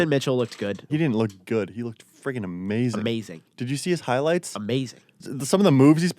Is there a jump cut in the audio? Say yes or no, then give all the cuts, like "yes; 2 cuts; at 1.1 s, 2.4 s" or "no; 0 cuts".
yes; 2 cuts; at 0.8 s, 5.2 s